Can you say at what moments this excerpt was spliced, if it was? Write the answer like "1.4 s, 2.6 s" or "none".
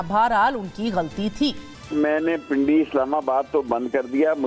1.7 s